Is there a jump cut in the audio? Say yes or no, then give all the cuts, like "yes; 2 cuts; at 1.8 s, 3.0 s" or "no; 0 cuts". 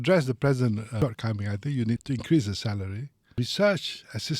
yes; 3 cuts; at 0.9 s, 2.0 s, 3.4 s